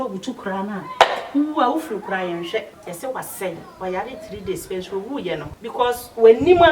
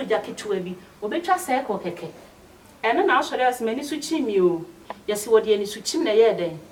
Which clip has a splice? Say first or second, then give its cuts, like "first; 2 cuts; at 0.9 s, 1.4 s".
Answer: first; 2 cuts; at 2.8 s, 5.6 s